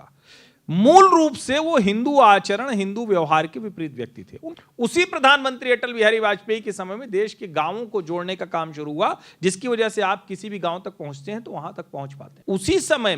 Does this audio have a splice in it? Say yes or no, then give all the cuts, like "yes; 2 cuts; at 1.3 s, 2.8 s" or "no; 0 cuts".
yes; 2 cuts; at 4.4 s, 12.2 s